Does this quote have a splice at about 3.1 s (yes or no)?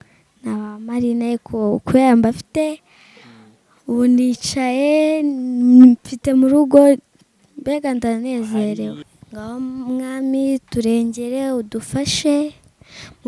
no